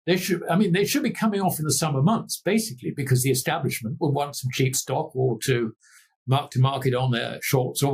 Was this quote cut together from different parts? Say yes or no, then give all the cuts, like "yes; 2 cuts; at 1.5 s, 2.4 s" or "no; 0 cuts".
no; 0 cuts